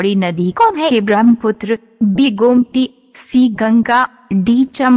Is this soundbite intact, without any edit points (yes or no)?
yes